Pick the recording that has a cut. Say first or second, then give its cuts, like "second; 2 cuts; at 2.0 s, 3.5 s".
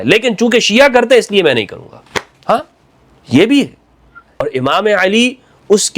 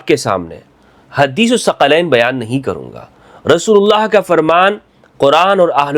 first; 1 cut; at 4.4 s